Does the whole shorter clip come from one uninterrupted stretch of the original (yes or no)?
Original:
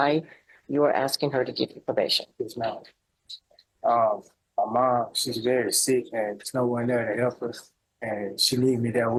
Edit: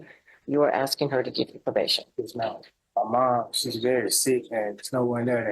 no